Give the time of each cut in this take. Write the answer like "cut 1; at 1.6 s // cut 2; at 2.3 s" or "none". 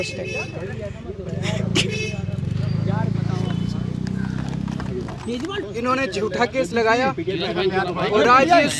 cut 1; at 5.7 s